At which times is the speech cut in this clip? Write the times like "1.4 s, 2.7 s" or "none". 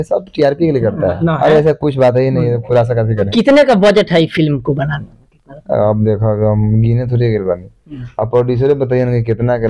1.2 s, 3.3 s